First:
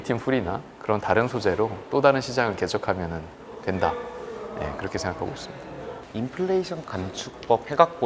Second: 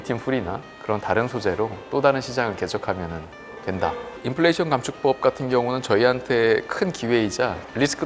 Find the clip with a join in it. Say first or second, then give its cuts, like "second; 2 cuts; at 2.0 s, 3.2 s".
second; 1 cut; at 4.1 s